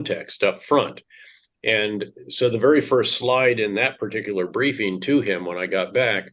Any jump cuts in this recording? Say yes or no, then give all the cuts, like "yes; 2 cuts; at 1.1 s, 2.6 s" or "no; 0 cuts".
no; 0 cuts